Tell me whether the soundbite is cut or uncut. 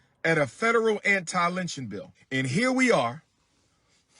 cut